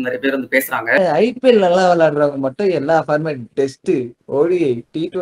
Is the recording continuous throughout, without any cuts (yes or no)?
no